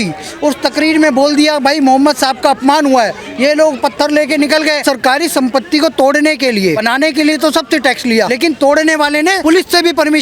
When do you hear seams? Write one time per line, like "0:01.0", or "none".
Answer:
0:04.8
0:06.8
0:08.3
0:09.4